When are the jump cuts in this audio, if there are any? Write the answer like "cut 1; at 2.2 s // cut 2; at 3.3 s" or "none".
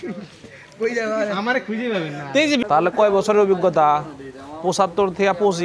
cut 1; at 2.6 s